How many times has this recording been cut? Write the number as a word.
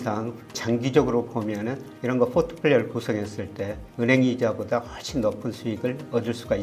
zero